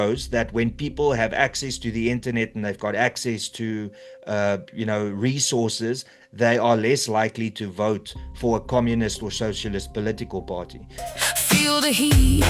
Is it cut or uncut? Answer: cut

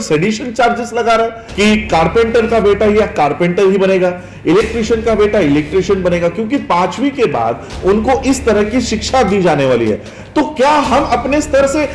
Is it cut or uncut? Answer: cut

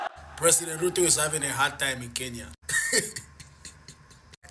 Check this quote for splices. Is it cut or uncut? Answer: cut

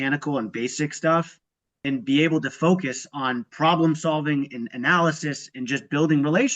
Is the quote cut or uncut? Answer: cut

